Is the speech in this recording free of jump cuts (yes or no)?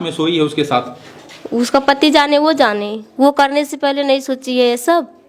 yes